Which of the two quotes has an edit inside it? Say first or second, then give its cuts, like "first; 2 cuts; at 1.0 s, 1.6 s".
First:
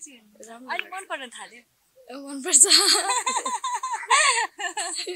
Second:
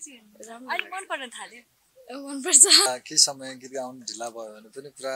second; 1 cut; at 2.9 s